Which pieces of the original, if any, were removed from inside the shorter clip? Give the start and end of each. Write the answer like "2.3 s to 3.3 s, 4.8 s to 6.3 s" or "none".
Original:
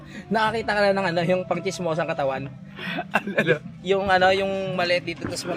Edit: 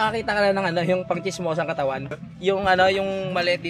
2.7 s to 3.7 s